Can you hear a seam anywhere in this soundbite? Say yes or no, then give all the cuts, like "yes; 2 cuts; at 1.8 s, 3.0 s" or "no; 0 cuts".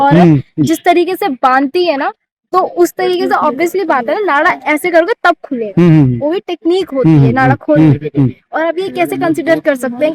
no; 0 cuts